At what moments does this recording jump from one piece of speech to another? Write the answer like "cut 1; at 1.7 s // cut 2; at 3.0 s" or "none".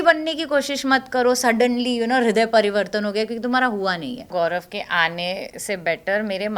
cut 1; at 4.3 s